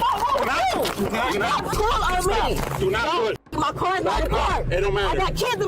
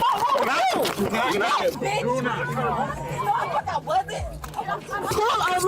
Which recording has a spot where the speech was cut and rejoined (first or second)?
first